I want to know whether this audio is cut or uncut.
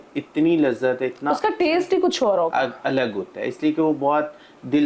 uncut